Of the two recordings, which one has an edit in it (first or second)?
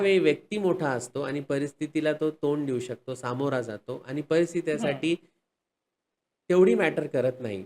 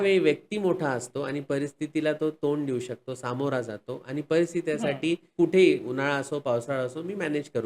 second